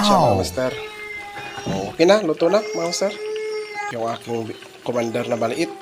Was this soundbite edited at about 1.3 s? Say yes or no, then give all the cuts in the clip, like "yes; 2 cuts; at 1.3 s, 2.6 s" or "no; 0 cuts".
no; 1 cut; at 3.9 s